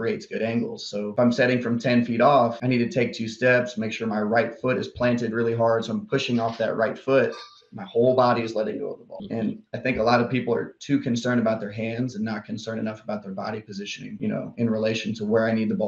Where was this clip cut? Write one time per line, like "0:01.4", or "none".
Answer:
none